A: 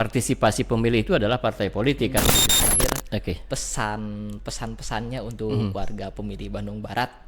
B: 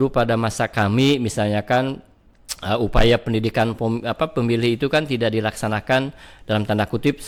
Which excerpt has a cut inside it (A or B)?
A